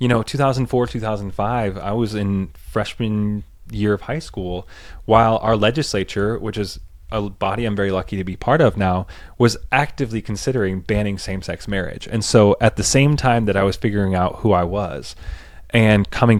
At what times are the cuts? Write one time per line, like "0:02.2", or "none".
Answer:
none